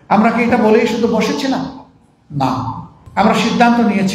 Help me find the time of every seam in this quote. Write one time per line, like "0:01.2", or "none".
0:02.9